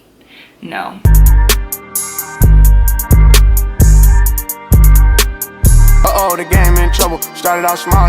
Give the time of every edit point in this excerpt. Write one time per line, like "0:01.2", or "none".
0:01.0